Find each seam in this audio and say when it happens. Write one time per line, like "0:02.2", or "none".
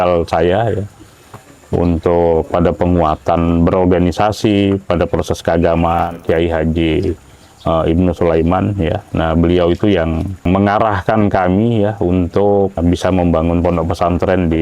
0:06.2
0:10.4
0:12.8